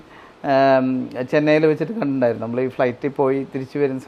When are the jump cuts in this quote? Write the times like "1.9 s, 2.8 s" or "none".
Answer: none